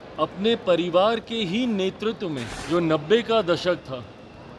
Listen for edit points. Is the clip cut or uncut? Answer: cut